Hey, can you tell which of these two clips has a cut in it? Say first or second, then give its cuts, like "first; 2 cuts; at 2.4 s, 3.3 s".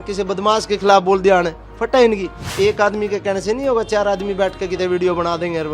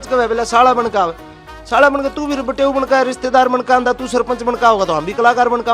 first; 1 cut; at 2.4 s